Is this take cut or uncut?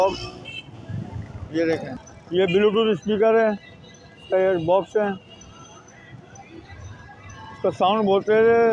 cut